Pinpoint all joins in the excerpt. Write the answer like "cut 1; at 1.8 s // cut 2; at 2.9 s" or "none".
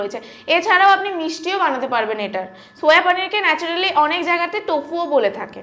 none